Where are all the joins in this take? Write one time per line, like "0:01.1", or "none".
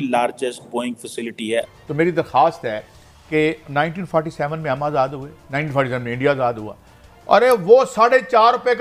0:01.7